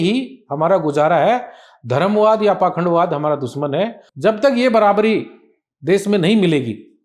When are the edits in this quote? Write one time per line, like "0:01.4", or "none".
0:04.0